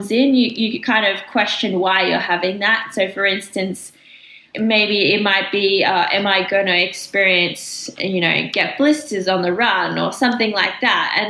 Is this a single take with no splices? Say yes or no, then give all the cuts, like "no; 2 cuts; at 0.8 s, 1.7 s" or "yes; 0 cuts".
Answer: no; 1 cut; at 4.4 s